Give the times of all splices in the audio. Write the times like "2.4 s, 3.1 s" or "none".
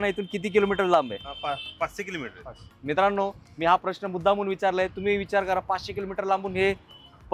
none